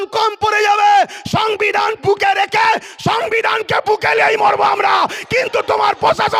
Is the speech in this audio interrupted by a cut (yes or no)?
no